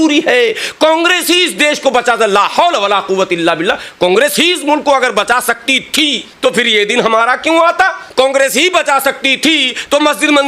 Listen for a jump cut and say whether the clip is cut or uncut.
cut